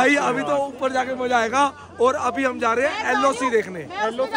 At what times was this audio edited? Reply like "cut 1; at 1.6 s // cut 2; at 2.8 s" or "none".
none